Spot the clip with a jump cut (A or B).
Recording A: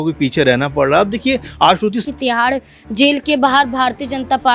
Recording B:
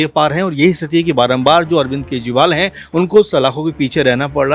A